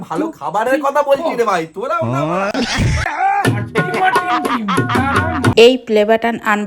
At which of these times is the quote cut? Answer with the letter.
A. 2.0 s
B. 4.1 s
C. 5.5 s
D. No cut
C